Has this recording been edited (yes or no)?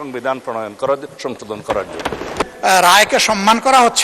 yes